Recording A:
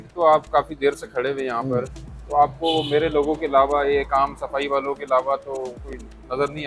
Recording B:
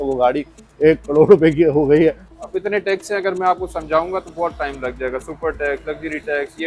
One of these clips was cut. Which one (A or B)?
B